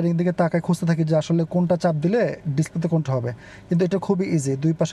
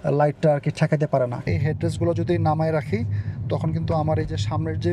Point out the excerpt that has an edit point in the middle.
second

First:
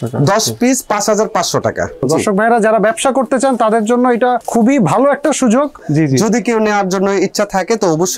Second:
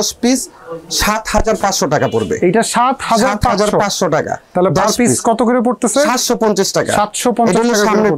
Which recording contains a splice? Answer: first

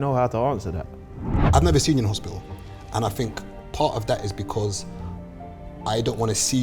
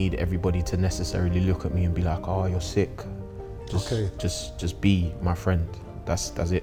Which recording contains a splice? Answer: first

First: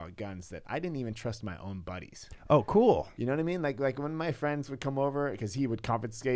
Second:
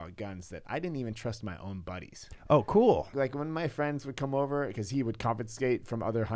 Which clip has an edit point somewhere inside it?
second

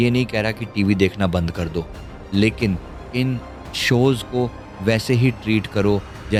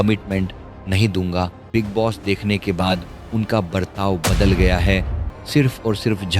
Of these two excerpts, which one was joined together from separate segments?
second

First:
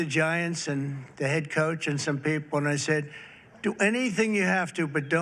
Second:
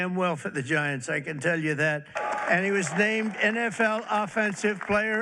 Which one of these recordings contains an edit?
second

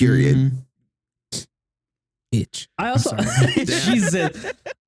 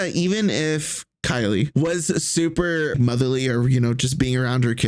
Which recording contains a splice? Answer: second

